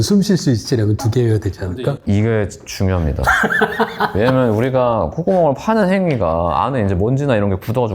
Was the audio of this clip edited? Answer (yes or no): no